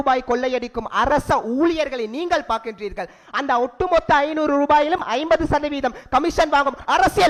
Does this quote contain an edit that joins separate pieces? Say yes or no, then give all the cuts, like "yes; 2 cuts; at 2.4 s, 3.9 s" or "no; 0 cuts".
no; 0 cuts